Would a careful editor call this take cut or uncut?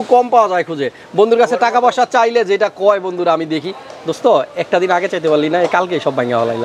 uncut